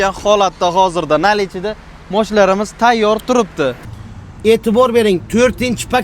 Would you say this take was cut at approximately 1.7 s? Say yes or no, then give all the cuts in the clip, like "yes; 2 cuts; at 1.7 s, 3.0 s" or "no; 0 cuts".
no; 1 cut; at 3.9 s